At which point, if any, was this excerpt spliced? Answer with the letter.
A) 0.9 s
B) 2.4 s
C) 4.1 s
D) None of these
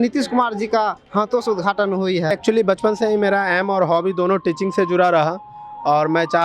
B